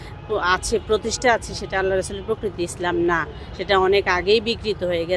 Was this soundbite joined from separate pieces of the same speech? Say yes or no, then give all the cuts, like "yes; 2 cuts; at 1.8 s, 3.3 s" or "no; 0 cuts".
no; 0 cuts